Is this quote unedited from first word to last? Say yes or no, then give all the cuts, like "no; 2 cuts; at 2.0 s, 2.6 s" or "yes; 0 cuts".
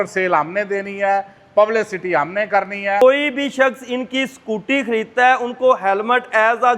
no; 1 cut; at 3.0 s